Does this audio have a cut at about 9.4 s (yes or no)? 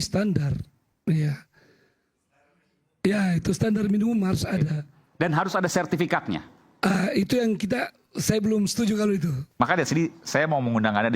yes